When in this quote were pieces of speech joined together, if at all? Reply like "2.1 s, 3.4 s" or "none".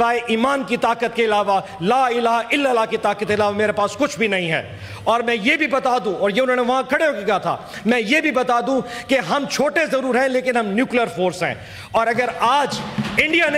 none